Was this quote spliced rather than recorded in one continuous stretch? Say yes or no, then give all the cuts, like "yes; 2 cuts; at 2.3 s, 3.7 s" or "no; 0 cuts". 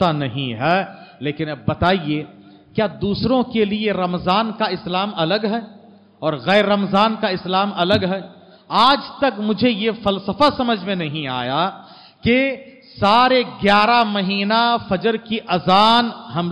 no; 0 cuts